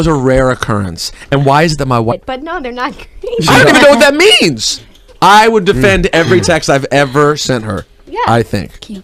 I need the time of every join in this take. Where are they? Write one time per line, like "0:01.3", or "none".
none

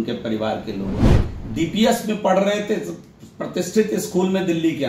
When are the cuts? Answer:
0:01.2

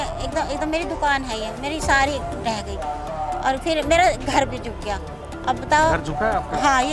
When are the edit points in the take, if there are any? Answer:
none

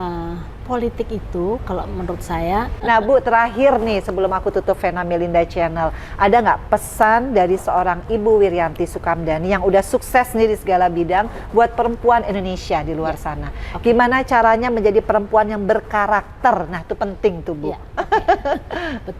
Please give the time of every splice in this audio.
0:02.7

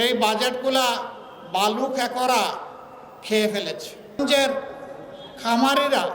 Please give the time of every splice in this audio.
0:04.2

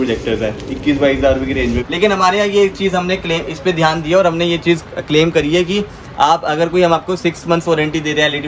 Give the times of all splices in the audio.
0:01.8

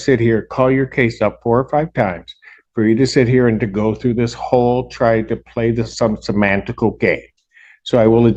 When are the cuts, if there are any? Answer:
none

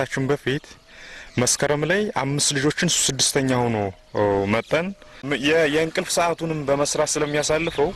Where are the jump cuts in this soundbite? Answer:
0:05.3

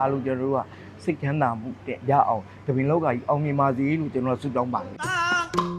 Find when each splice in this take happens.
0:04.9

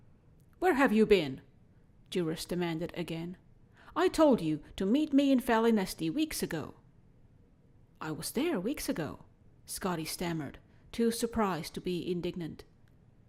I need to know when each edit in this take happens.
none

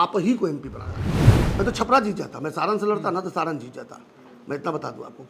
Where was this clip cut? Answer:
0:01.1

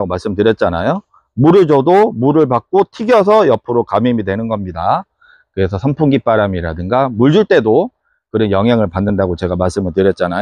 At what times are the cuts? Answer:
none

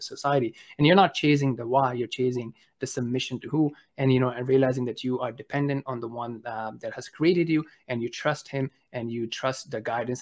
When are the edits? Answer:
none

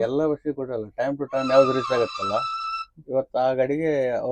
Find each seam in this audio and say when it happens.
none

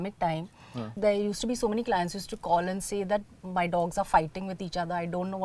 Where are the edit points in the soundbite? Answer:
0:01.0

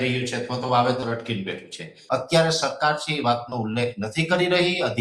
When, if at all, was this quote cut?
0:01.9

